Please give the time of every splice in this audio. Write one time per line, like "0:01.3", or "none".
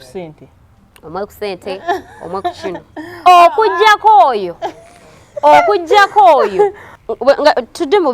0:06.9